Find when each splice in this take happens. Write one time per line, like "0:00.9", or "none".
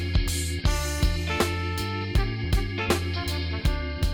none

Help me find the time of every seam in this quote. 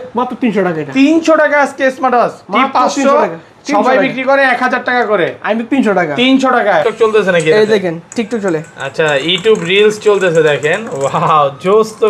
0:06.8

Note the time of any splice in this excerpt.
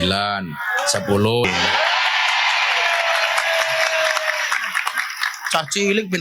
0:01.5

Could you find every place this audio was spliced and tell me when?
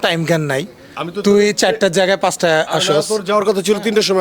none

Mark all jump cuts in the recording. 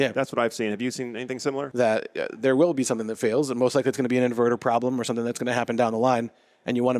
0:01.7

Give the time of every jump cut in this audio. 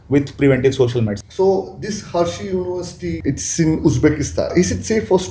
0:01.2
0:03.0
0:04.5

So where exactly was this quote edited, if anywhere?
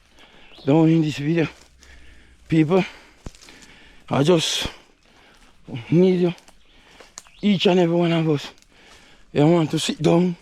none

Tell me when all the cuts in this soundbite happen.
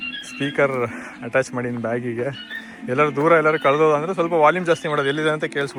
none

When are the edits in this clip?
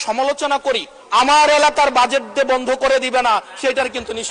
0:00.9

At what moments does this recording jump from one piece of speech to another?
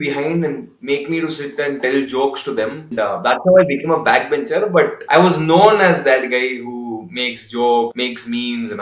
0:02.9
0:05.0
0:07.9

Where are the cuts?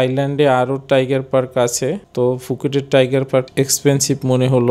none

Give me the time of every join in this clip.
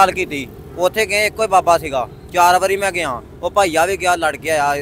none

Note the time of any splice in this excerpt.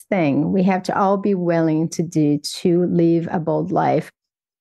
none

